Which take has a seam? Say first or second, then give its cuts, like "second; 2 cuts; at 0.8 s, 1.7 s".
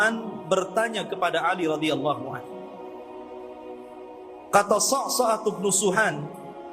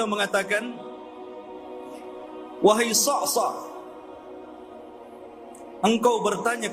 second; 4 cuts; at 1.0 s, 2.6 s, 3.7 s, 5.8 s